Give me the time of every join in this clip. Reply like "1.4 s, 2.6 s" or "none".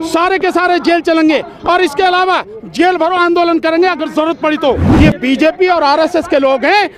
4.9 s